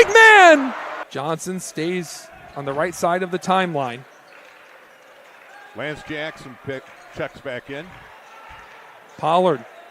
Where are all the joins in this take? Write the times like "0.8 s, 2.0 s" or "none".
1.0 s